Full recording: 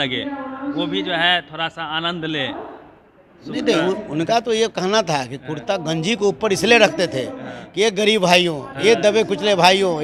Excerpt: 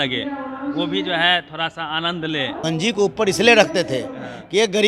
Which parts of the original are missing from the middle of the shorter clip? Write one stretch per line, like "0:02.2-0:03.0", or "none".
0:02.6-0:05.8